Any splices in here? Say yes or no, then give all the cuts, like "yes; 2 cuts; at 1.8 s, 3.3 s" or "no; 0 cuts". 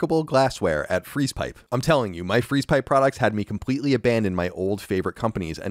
yes; 1 cut; at 1.5 s